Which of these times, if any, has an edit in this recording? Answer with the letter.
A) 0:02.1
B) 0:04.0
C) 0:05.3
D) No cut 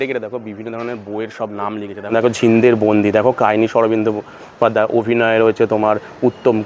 A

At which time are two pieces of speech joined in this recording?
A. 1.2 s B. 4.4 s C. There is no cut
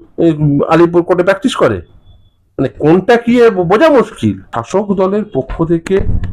B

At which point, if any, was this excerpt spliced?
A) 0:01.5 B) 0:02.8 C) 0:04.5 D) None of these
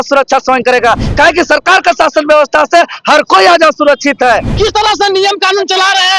C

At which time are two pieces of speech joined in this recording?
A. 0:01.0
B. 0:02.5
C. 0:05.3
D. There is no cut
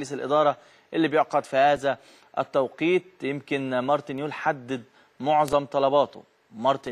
B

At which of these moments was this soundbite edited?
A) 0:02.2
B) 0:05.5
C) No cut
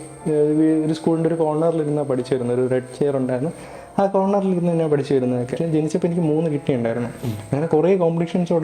B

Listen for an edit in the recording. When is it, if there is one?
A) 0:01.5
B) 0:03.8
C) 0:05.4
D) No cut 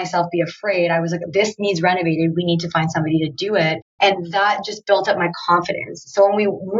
B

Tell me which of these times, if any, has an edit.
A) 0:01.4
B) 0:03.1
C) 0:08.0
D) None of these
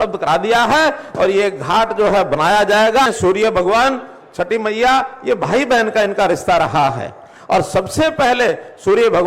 B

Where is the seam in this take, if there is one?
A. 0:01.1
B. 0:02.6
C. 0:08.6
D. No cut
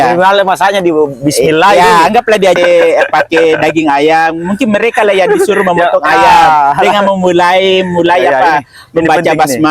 B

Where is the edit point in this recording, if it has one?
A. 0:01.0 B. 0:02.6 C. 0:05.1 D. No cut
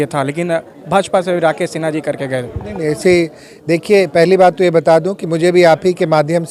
D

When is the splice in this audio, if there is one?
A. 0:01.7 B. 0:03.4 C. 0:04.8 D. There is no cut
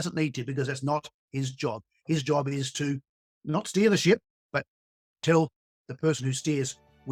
D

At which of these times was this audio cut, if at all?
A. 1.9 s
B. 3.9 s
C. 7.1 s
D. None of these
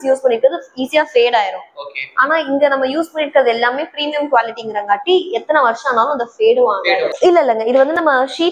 C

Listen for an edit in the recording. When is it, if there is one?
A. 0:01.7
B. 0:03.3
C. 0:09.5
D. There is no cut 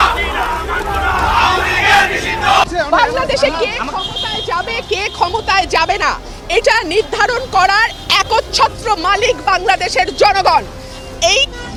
D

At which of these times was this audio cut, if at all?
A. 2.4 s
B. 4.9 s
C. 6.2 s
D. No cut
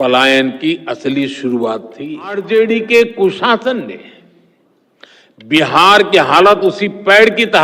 A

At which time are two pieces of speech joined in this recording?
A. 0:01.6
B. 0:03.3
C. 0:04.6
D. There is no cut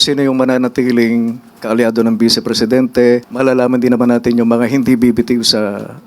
B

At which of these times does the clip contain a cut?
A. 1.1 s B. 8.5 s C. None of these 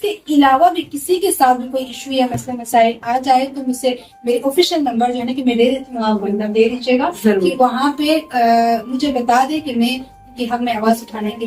C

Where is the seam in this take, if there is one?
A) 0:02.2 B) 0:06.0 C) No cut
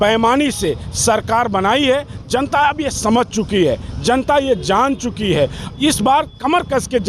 C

